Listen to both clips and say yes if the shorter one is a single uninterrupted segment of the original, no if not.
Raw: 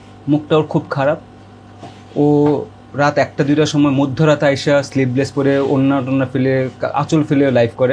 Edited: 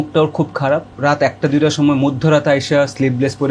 no